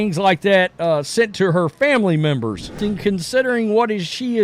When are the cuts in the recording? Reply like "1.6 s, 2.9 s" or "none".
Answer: 2.7 s